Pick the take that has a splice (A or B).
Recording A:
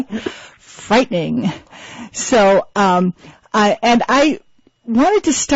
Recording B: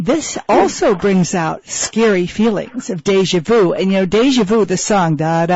B